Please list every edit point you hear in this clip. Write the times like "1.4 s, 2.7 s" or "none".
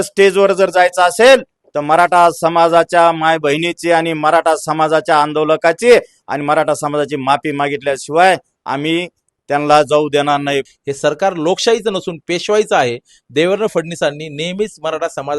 10.7 s